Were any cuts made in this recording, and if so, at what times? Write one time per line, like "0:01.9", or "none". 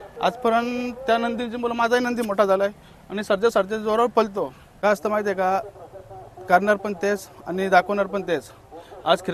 0:04.6